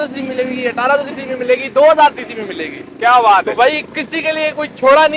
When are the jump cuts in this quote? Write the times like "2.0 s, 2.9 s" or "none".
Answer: none

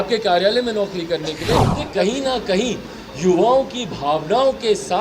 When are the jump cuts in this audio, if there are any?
1.8 s

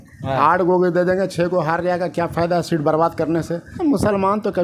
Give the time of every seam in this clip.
3.7 s

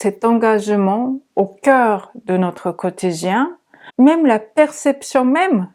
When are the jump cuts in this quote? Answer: none

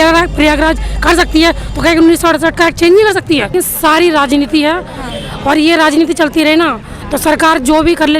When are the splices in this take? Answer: 3.5 s

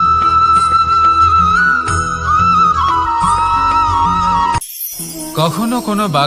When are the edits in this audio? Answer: 4.5 s

